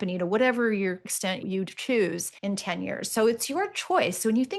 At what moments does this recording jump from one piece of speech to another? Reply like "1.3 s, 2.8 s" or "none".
1.4 s, 2.3 s